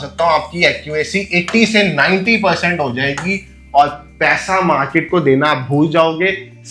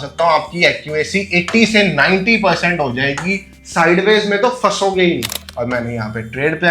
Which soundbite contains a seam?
second; 2 cuts; at 3.5 s, 5.4 s

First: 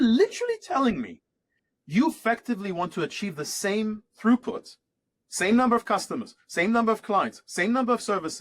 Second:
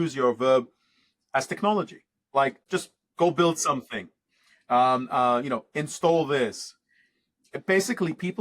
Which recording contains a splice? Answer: second; 1 cut; at 2.6 s

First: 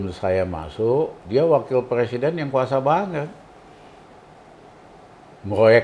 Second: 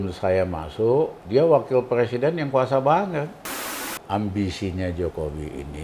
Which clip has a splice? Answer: second; 1 cut; at 3.9 s

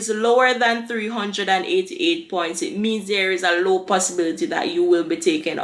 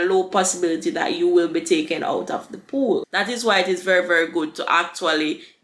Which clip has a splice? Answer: second; 1 cut; at 3.1 s

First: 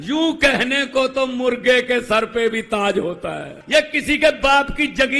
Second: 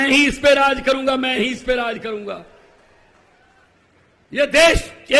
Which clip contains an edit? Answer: first; 1 cut; at 3.5 s

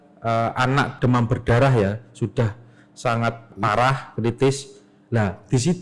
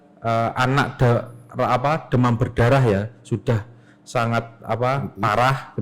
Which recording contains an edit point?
first; 2 cuts; at 0.9 s, 3.5 s

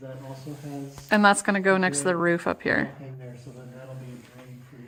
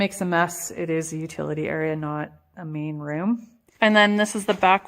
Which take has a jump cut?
second; 1 cut; at 3.6 s

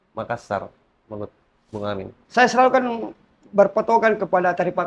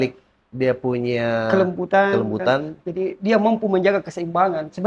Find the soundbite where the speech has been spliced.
first; 1 cut; at 2.2 s

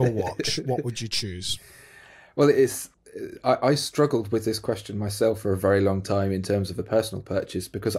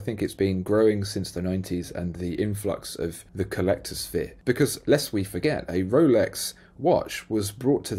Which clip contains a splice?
second; 2 cuts; at 3.2 s, 4.3 s

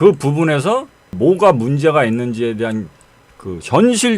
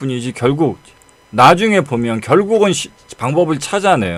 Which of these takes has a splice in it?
first; 1 cut; at 1.2 s

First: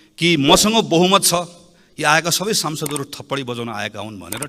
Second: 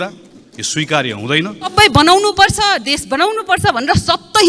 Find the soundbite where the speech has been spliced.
second; 1 cut; at 1.7 s

